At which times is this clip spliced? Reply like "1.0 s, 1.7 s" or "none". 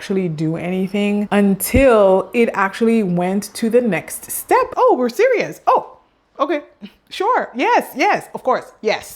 1.3 s

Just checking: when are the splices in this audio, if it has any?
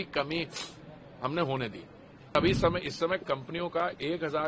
2.4 s

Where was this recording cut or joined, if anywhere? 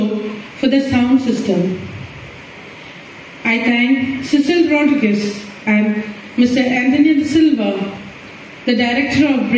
none

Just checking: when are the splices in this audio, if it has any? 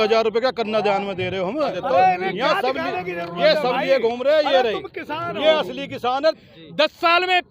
1.8 s, 6.2 s

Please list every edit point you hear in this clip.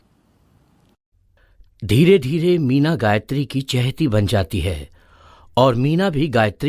none

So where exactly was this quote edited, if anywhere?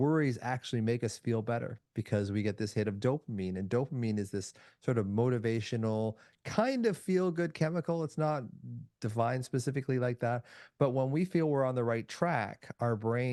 none

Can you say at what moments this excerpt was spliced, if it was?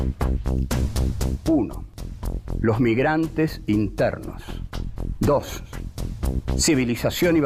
1.6 s

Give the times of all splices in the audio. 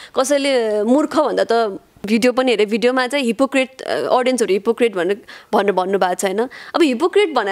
1.9 s

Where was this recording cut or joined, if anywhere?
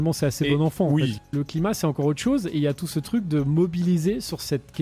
1.2 s

